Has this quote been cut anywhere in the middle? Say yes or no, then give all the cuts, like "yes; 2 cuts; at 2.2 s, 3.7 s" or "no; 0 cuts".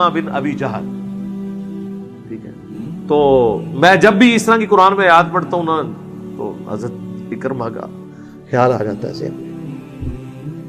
yes; 1 cut; at 9.2 s